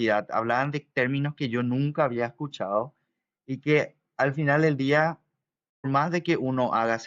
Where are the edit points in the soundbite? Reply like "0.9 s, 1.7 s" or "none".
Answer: 5.8 s

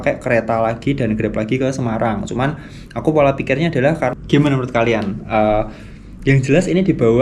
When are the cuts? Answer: 4.2 s

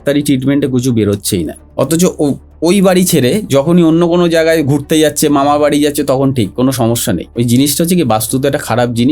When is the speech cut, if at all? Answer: 1.6 s, 7.5 s

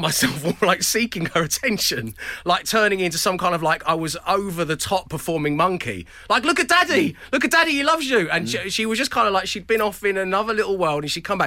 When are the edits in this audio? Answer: none

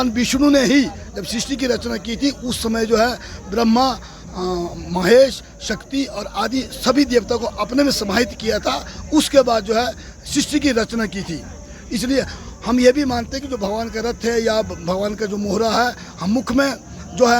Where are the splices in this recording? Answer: none

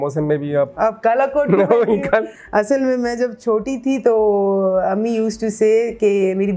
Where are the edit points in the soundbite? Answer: 2.4 s

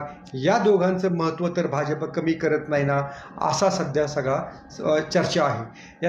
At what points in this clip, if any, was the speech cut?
none

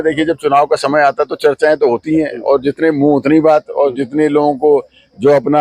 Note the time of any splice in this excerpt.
none

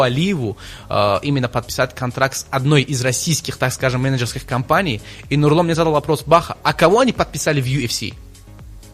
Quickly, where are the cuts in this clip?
none

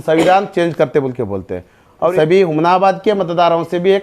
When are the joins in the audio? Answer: 2.1 s

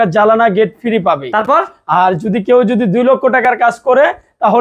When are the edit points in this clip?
none

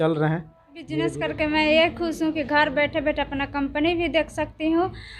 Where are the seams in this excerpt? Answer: 1.1 s

